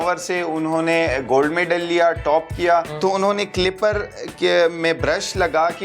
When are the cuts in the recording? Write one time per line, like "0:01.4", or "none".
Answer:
0:02.9